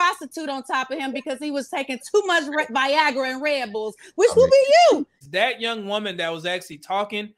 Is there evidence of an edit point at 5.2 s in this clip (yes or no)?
yes